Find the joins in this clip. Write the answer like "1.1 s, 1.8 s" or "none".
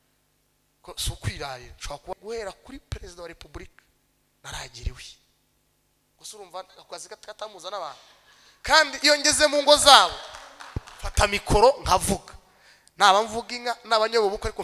2.1 s